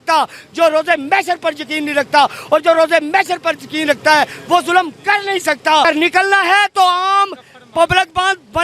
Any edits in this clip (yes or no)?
yes